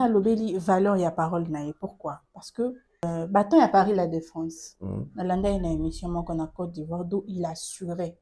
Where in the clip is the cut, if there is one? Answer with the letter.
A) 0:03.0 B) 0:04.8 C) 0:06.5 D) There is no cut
A